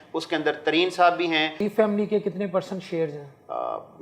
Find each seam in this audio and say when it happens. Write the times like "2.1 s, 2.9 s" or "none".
1.7 s